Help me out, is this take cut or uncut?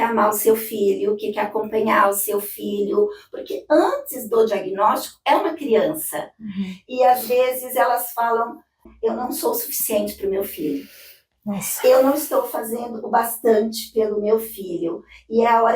cut